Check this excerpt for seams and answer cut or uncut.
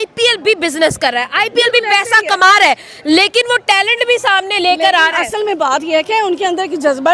uncut